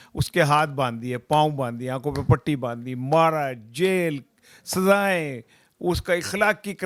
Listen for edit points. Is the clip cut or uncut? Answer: uncut